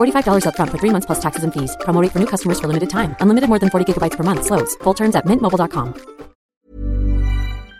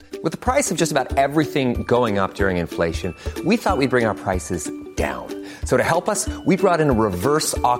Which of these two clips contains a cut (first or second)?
first